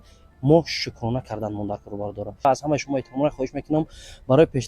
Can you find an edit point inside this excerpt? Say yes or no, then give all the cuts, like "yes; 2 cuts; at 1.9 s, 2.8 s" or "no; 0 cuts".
yes; 1 cut; at 2.4 s